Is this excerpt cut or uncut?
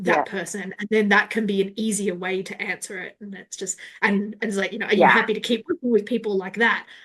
uncut